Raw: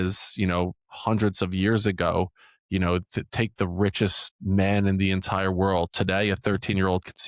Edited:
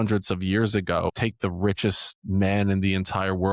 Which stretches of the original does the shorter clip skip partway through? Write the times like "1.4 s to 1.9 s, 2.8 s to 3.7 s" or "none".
2.3 s to 3.3 s